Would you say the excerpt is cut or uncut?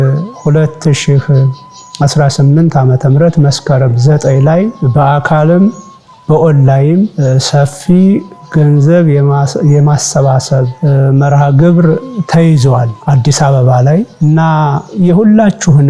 uncut